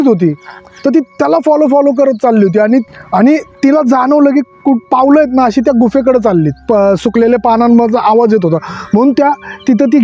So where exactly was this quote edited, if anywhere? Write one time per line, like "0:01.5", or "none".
0:03.0